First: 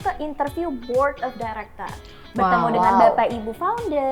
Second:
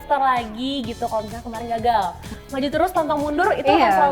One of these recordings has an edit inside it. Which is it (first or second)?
second